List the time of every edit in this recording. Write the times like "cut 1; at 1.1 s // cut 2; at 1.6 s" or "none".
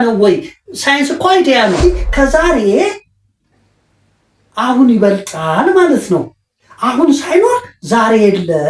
cut 1; at 1.8 s